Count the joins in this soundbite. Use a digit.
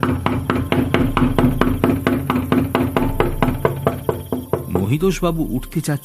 1